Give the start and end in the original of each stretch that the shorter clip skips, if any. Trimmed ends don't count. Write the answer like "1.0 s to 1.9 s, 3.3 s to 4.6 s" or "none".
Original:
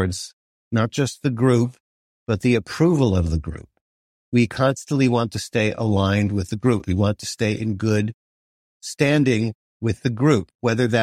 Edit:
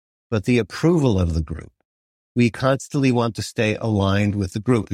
none